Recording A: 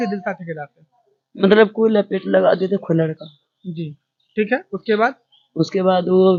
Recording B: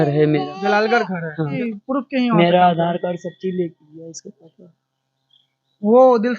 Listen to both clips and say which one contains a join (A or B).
B